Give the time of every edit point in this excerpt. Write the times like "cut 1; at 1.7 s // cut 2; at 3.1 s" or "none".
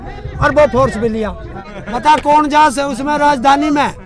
cut 1; at 1.6 s